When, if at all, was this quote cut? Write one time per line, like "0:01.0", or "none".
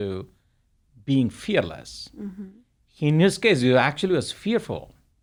none